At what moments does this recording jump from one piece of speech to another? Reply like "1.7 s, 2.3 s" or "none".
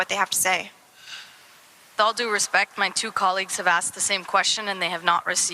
1.9 s

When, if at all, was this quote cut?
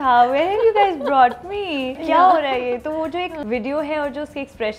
2.0 s, 3.4 s

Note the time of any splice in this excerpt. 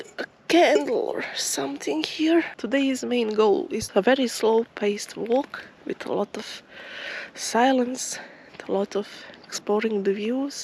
2.6 s, 3.8 s

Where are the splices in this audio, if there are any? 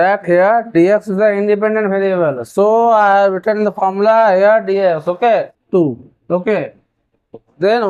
5.5 s

